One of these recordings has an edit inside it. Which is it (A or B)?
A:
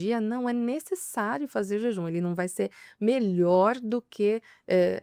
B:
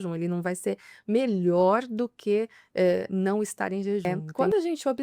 B